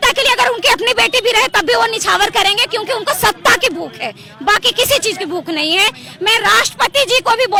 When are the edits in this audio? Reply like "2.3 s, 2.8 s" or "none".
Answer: none

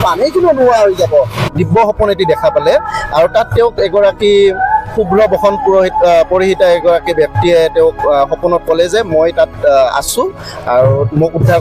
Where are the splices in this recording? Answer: 1.5 s

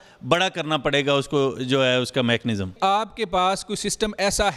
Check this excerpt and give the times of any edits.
none

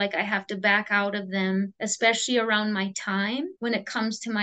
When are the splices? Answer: 1.8 s, 3.5 s

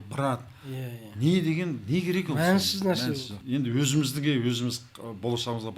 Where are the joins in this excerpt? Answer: 3.4 s

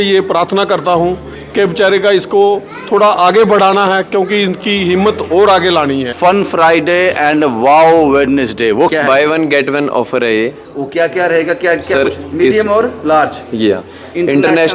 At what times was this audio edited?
6.1 s, 8.9 s

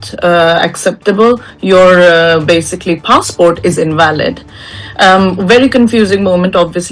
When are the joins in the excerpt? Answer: none

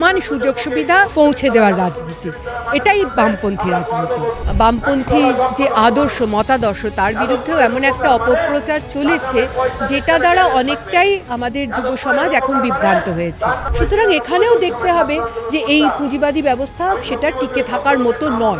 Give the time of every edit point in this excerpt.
1.1 s, 4.4 s, 13.7 s

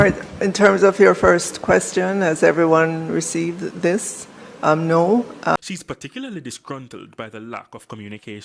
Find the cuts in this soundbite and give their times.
5.6 s

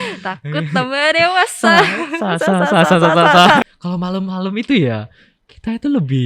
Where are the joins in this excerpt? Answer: 3.6 s

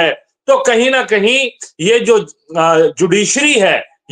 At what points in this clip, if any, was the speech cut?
none

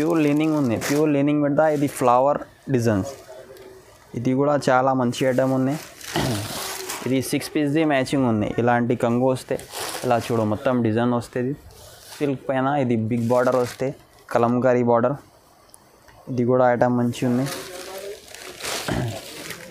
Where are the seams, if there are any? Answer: 12.1 s

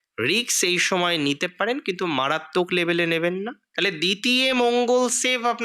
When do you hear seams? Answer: 3.6 s

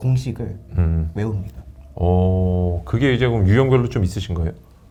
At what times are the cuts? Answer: none

